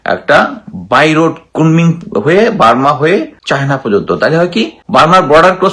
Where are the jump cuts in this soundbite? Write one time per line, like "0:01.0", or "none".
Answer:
0:03.4
0:04.8